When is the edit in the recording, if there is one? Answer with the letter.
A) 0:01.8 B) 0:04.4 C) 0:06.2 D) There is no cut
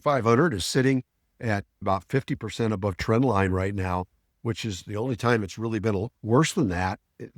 A